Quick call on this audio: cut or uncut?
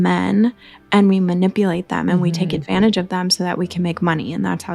uncut